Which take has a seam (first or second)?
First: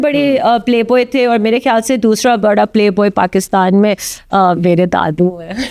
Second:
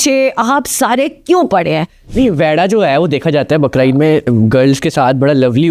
second